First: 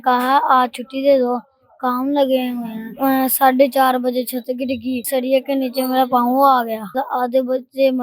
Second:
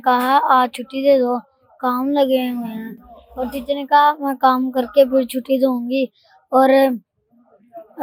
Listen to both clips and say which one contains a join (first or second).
first